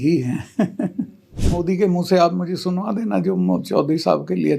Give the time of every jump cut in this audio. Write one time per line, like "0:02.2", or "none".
0:01.3